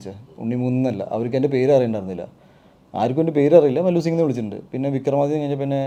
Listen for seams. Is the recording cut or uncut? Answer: uncut